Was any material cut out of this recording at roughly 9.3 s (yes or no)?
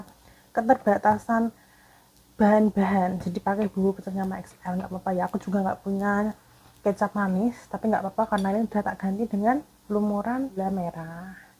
no